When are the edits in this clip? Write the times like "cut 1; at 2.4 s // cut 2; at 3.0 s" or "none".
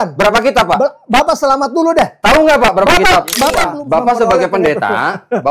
cut 1; at 3.6 s